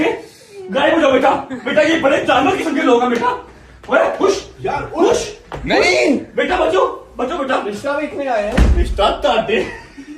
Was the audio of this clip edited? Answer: no; 0 cuts

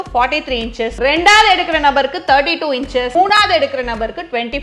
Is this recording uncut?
no; 2 cuts; at 1.0 s, 3.1 s

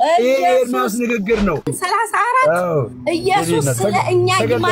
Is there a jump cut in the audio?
yes; 1 cut; at 1.6 s

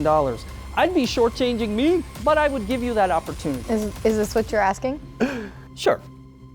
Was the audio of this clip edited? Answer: yes; 2 cuts; at 2.1 s, 3.6 s

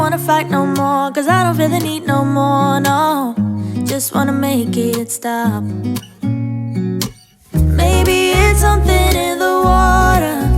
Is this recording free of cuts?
no; 1 cut; at 1.9 s

